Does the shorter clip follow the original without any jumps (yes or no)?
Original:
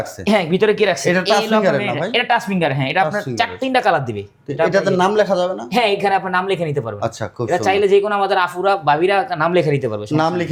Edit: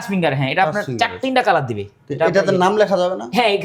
yes